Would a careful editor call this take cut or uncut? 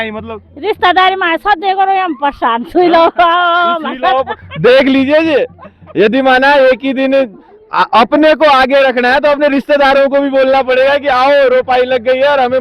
uncut